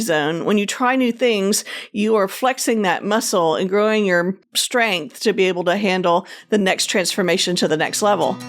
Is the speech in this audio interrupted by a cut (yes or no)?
no